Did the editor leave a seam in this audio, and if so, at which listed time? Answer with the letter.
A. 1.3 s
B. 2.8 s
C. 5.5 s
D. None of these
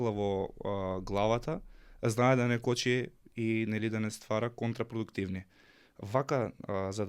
D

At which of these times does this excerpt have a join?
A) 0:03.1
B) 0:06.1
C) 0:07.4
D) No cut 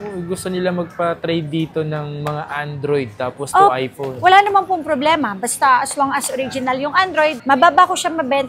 C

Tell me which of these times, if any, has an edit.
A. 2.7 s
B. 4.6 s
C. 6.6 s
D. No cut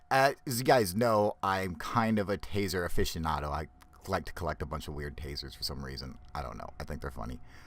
B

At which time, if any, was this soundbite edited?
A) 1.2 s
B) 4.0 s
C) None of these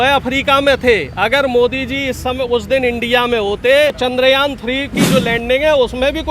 B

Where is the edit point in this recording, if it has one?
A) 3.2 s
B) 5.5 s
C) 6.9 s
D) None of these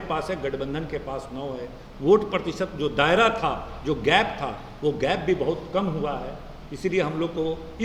D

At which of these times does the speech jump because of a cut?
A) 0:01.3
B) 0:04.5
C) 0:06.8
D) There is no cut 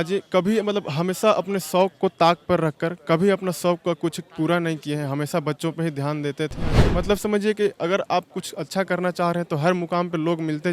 C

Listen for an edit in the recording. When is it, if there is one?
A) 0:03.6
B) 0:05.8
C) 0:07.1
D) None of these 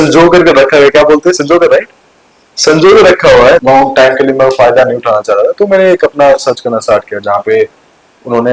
A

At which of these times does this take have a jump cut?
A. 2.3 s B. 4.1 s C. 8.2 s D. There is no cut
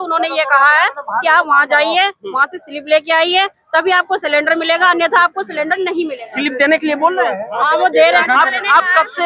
C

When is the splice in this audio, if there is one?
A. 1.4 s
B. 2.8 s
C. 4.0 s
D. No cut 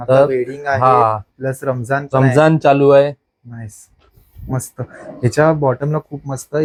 D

